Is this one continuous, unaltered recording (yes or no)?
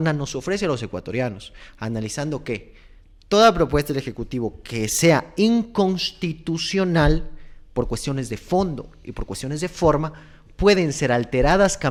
yes